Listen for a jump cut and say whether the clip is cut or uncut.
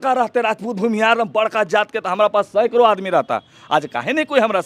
uncut